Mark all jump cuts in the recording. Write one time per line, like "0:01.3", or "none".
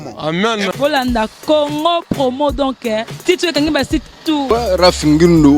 0:04.4